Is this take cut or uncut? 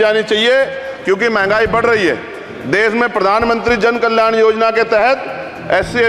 uncut